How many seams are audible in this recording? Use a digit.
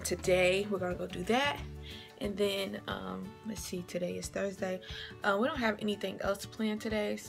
1